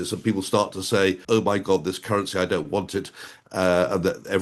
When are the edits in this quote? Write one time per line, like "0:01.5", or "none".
0:01.2